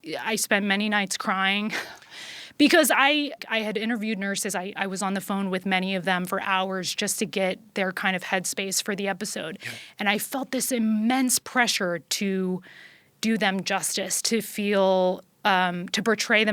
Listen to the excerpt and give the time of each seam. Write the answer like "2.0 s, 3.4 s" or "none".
3.4 s